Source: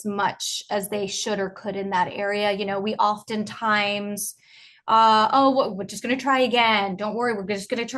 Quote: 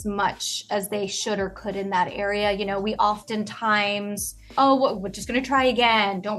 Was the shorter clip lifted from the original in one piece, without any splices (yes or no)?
no